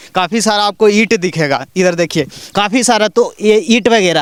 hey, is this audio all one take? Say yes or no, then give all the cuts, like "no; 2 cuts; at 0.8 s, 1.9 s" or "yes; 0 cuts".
yes; 0 cuts